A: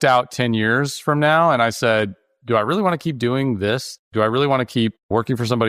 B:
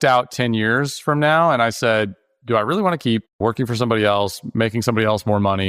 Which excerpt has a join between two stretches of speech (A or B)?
B